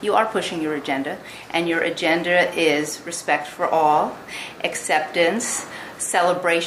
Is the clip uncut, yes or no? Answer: yes